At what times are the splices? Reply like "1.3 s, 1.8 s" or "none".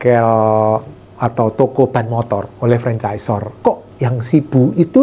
3.5 s